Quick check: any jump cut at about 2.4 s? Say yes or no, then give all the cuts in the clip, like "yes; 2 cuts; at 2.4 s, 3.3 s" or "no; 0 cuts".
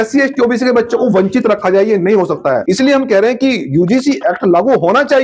yes; 1 cut; at 2.4 s